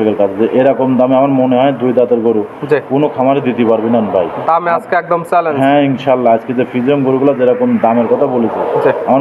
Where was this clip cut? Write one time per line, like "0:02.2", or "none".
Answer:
none